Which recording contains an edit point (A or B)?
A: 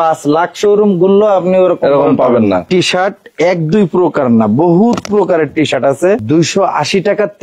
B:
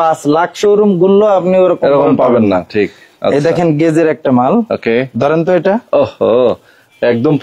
A